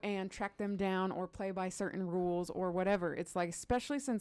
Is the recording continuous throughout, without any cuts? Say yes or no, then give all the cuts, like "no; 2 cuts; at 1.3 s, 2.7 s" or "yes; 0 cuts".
yes; 0 cuts